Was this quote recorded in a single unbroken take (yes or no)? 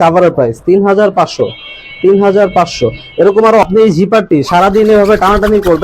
no